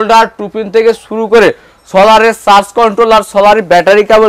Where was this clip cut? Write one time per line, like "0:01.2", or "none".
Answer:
none